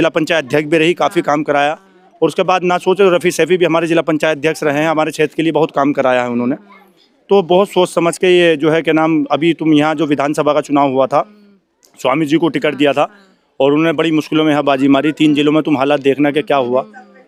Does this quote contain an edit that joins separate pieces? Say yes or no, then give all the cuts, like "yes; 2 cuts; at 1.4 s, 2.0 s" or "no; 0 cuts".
no; 0 cuts